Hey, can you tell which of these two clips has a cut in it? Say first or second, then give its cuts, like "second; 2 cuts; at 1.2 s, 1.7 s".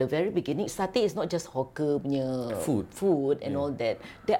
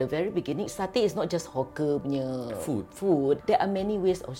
second; 1 cut; at 3.4 s